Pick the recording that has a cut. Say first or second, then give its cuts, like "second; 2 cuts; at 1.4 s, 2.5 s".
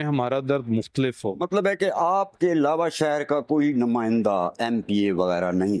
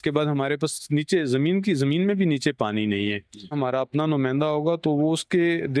second; 1 cut; at 3.4 s